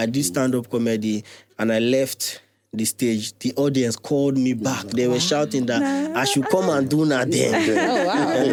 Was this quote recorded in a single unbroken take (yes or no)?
yes